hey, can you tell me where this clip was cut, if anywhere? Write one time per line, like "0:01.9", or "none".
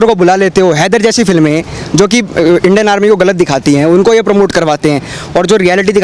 none